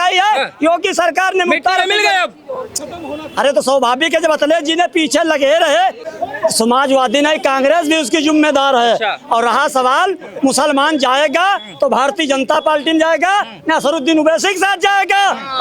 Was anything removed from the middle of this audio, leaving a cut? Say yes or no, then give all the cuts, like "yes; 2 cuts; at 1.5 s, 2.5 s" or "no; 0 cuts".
yes; 1 cut; at 6.0 s